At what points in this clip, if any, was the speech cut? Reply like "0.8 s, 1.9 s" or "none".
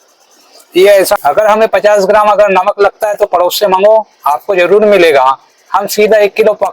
1.2 s

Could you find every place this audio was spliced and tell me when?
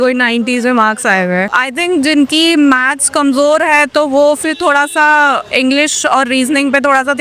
1.5 s

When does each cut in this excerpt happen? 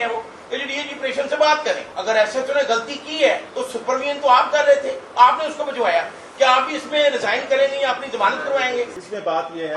1.9 s, 3.5 s, 8.9 s

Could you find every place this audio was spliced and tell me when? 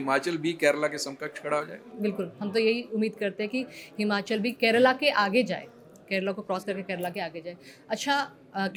none

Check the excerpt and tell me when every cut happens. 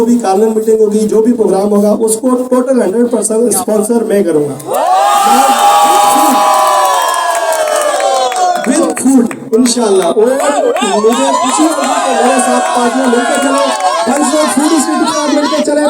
none

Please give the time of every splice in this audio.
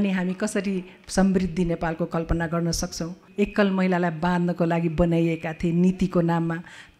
3.2 s

